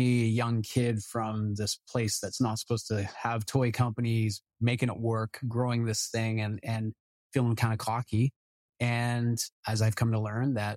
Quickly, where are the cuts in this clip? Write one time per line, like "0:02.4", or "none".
none